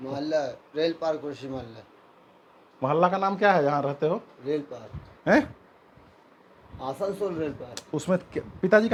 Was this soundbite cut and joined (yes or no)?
no